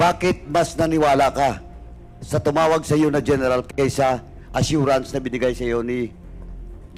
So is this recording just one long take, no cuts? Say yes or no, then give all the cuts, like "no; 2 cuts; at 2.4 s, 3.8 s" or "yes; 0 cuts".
yes; 0 cuts